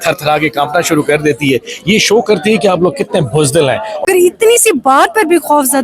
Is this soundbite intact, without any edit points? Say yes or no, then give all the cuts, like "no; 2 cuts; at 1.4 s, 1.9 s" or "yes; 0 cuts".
no; 1 cut; at 4.0 s